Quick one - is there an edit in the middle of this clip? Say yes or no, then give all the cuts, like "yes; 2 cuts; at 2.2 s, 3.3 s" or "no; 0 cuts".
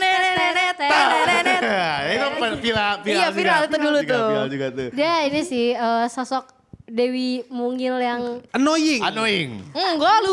no; 0 cuts